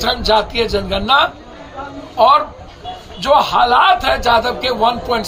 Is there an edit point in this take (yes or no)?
no